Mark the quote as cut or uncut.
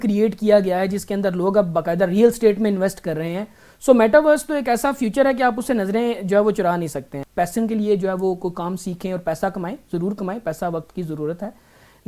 cut